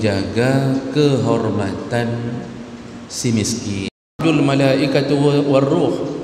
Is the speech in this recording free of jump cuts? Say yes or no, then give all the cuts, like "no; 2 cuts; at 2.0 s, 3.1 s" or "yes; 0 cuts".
no; 1 cut; at 4.2 s